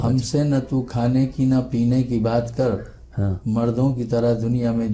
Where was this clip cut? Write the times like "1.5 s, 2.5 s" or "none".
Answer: none

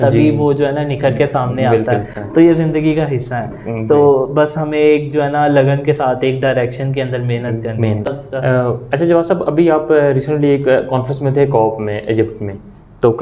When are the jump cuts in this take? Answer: none

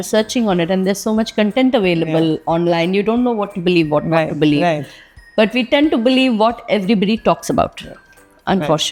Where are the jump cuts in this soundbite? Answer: none

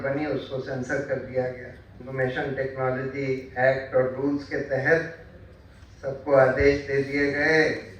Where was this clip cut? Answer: 2.0 s

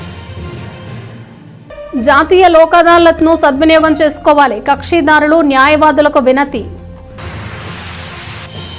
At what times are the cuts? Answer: none

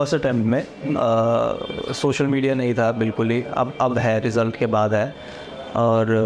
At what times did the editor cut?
none

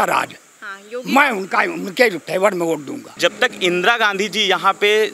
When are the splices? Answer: 3.0 s

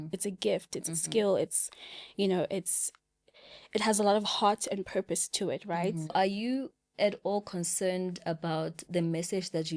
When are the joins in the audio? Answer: 6.1 s

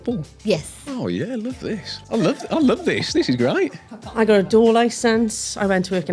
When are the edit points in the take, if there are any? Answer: 1.9 s, 3.9 s

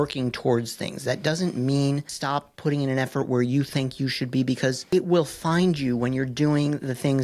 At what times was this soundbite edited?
2.1 s, 4.8 s

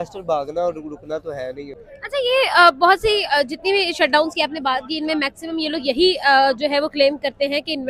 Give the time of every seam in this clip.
none

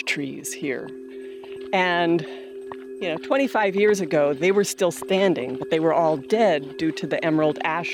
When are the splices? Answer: none

